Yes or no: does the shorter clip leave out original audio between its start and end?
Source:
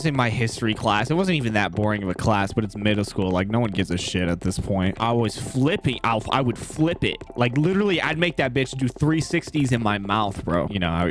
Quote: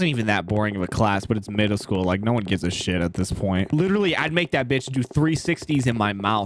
yes